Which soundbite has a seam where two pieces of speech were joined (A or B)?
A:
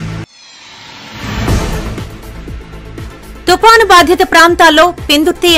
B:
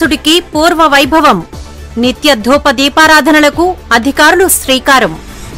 A